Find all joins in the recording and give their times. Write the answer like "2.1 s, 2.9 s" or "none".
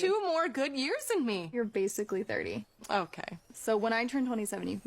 1.5 s

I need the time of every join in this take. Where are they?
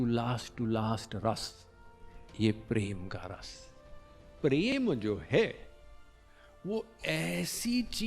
4.7 s

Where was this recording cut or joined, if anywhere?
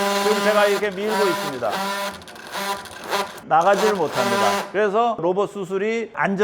5.2 s

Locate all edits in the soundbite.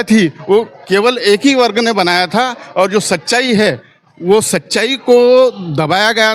none

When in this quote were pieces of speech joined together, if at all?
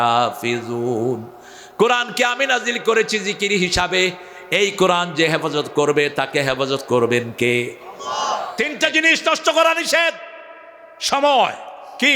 8.5 s

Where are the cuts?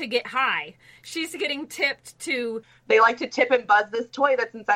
2.7 s

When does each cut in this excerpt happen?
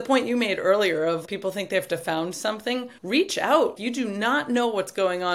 1.2 s, 3.0 s, 3.8 s

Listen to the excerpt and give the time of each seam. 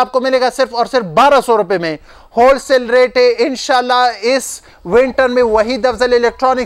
none

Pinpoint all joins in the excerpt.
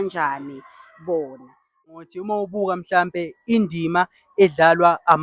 1.9 s

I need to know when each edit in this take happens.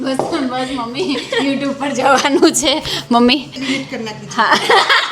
3.5 s

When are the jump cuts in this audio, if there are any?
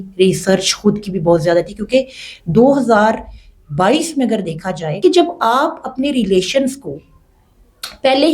4.9 s

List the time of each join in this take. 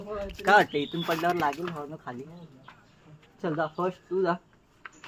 3.4 s

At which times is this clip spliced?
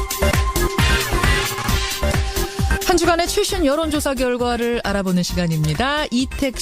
none

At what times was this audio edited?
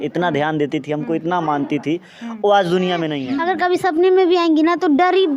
3.2 s

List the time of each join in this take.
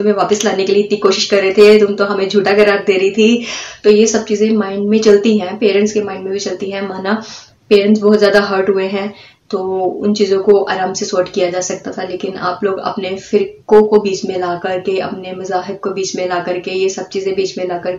none

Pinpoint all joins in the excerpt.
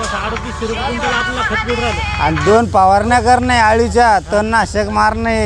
none

